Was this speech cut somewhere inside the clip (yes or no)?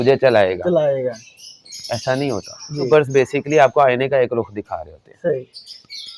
yes